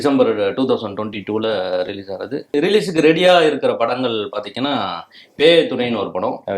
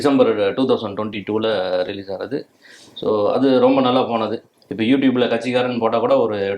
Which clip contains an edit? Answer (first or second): first